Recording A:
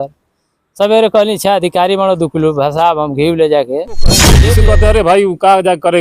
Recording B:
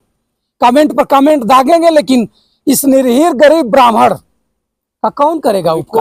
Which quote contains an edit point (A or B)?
A